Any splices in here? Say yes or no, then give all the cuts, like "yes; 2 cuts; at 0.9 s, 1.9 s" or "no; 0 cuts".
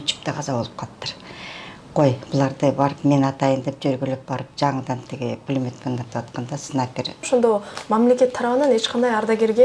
yes; 1 cut; at 7.2 s